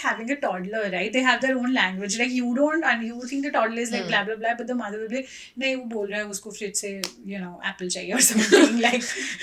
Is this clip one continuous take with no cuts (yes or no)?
yes